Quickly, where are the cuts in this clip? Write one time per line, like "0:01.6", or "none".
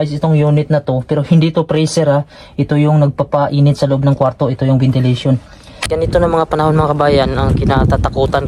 0:05.8

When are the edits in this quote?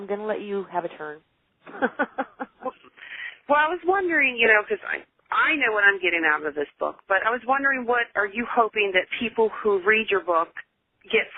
none

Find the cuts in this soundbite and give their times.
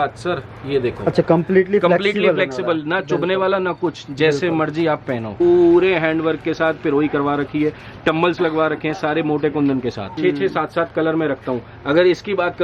0:05.4
0:10.1

